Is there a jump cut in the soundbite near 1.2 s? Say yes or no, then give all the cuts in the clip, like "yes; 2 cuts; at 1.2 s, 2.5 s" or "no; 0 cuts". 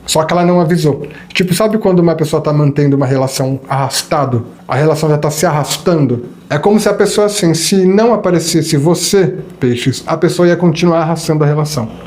no; 2 cuts; at 4.5 s, 6.3 s